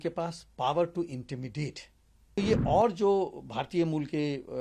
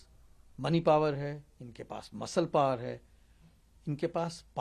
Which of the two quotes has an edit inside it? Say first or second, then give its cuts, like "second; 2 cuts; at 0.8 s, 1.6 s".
first; 1 cut; at 2.4 s